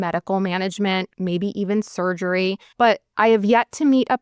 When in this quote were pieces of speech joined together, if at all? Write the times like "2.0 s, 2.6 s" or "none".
1.1 s, 2.8 s